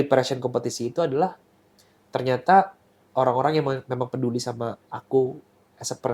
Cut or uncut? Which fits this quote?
uncut